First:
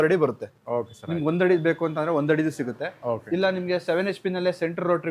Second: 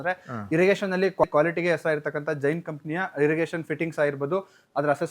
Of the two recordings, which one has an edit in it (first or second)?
second